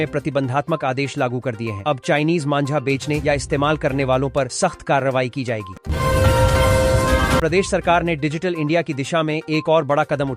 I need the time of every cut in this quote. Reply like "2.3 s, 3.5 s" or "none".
5.8 s, 7.4 s